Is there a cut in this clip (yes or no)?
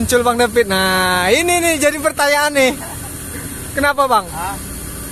no